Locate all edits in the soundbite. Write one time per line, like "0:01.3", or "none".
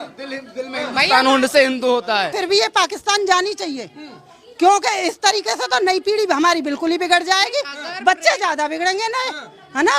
0:02.3